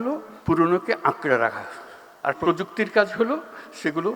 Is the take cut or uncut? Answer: cut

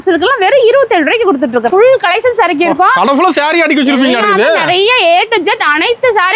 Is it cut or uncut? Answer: cut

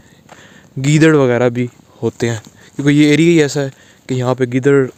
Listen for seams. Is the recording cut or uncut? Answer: uncut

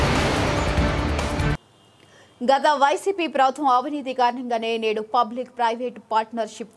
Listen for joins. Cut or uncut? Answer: cut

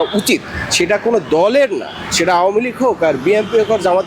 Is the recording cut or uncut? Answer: uncut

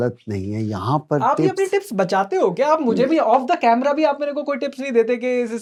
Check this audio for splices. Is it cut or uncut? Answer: uncut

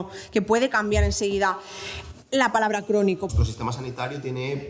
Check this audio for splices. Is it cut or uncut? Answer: cut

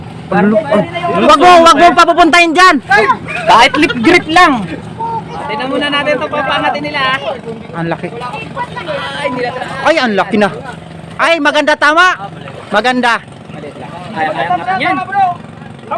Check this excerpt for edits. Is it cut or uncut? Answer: cut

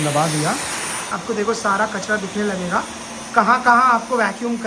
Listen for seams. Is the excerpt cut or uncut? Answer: cut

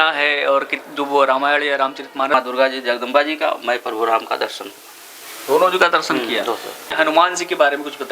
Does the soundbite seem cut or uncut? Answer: cut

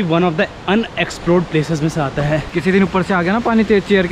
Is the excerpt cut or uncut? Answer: cut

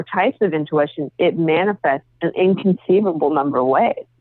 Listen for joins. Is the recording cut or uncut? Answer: uncut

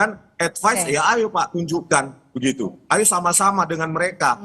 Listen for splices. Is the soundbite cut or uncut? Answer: uncut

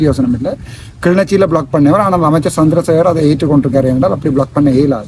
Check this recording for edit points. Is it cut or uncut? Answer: uncut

